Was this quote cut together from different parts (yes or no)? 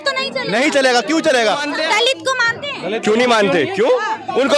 yes